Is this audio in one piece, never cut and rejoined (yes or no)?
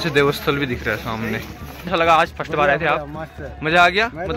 no